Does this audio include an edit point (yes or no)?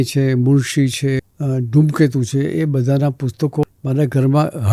yes